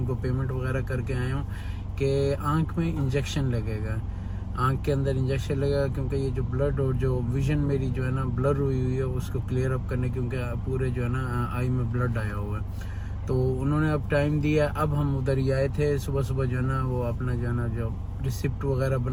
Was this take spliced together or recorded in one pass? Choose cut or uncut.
uncut